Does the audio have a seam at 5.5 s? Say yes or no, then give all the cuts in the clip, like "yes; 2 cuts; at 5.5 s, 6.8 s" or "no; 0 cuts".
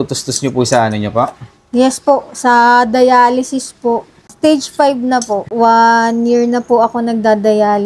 yes; 2 cuts; at 4.1 s, 5.5 s